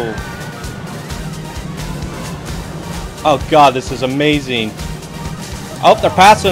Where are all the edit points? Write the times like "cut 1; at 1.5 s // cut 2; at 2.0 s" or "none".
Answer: cut 1; at 5.4 s

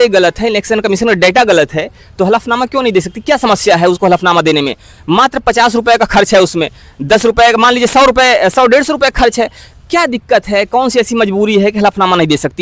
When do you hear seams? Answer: none

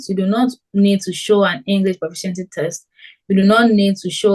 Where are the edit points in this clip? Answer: none

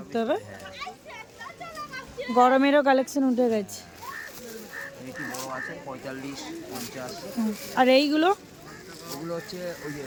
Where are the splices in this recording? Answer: none

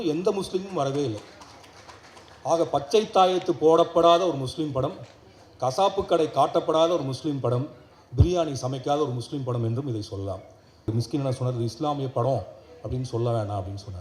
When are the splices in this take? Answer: cut 1; at 10.9 s

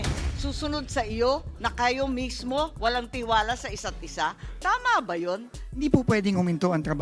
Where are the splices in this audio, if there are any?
cut 1; at 5.8 s

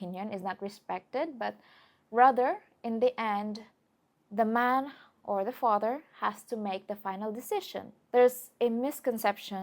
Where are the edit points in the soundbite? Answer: cut 1; at 8.0 s

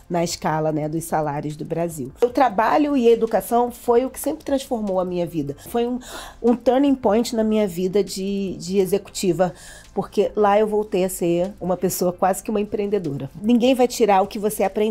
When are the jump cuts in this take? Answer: cut 1; at 2.2 s // cut 2; at 5.7 s // cut 3; at 13.4 s

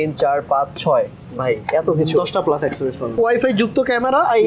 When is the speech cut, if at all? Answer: cut 1; at 3.2 s

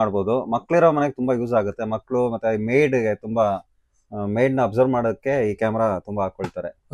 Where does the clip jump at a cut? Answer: none

